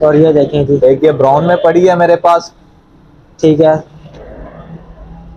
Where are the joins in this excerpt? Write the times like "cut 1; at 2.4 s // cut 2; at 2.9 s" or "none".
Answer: none

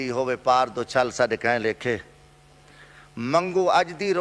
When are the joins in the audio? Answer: none

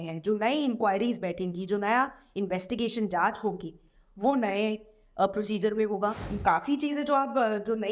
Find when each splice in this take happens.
cut 1; at 6.3 s

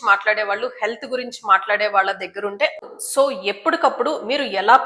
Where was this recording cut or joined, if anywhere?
cut 1; at 2.8 s

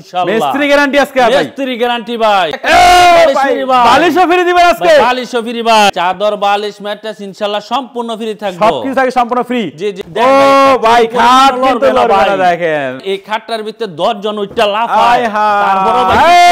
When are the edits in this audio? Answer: cut 1; at 2.5 s // cut 2; at 5.9 s // cut 3; at 10.0 s // cut 4; at 13.0 s

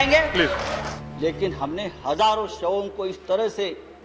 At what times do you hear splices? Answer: cut 1; at 1.0 s

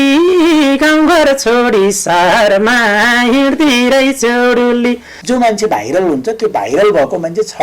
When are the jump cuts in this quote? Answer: cut 1; at 5.1 s

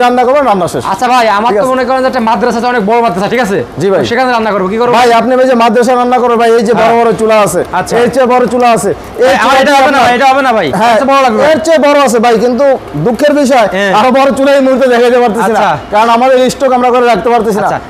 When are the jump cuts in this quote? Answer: none

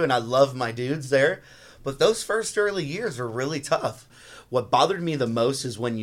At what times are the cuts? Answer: cut 1; at 4.1 s

